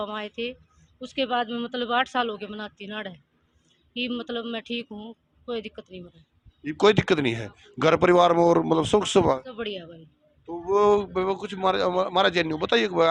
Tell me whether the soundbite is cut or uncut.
uncut